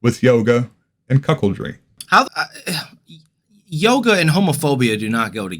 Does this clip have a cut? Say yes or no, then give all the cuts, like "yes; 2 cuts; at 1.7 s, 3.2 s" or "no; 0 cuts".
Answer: yes; 1 cut; at 2.1 s